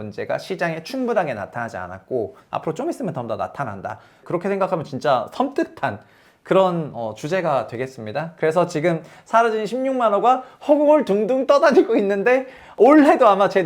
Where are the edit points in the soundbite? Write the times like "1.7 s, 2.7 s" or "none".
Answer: 12.8 s

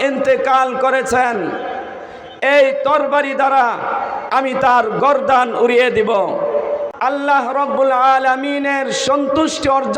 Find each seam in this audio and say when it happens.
6.9 s

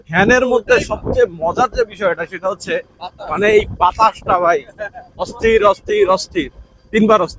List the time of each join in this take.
none

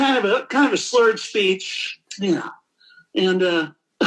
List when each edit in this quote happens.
none

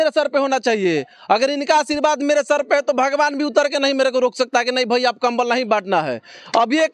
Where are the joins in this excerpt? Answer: none

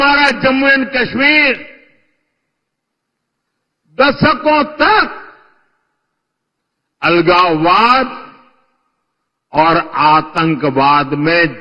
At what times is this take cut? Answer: none

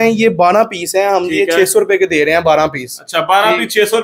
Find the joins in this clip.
none

